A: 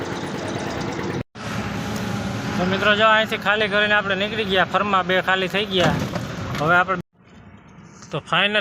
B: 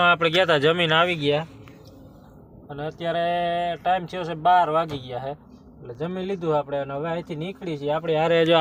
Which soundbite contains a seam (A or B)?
A